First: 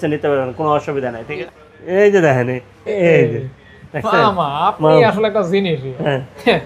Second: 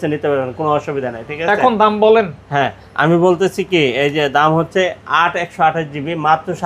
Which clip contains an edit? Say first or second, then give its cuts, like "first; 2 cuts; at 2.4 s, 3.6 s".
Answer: first; 1 cut; at 1.3 s